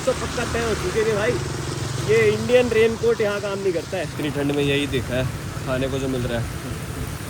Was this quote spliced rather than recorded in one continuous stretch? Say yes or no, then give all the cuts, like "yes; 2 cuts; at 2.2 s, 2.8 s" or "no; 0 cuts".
yes; 1 cut; at 4.1 s